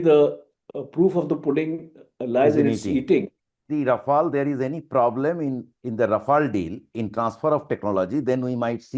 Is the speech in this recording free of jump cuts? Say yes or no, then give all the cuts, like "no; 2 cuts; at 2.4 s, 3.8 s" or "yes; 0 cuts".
no; 1 cut; at 3.6 s